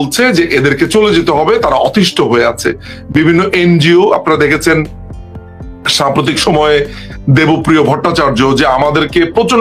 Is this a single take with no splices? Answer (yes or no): yes